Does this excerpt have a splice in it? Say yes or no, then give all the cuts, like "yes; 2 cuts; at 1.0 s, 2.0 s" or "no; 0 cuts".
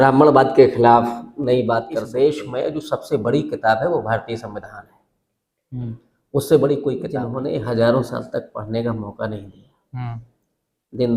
yes; 2 cuts; at 2.0 s, 7.2 s